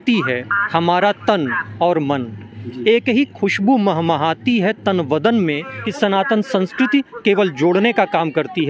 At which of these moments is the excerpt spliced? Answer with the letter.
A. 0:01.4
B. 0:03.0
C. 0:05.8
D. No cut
C